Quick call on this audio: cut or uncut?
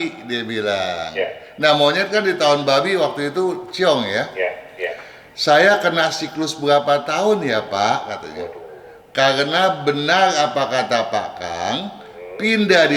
uncut